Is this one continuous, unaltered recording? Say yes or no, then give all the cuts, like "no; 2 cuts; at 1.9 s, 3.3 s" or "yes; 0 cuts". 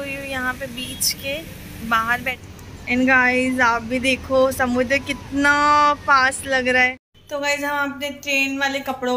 no; 2 cuts; at 2.4 s, 7.1 s